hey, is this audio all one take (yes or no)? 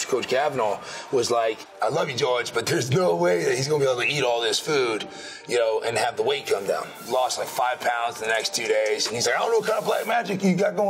no